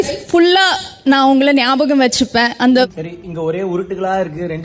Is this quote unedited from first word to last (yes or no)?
yes